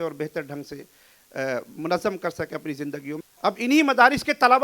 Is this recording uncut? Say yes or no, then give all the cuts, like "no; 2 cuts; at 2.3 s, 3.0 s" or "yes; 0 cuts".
no; 1 cut; at 3.1 s